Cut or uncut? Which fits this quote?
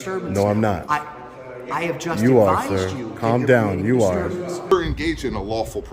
cut